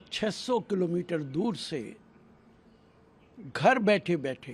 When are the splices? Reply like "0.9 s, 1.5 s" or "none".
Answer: none